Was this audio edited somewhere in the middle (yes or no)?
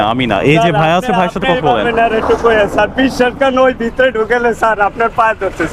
no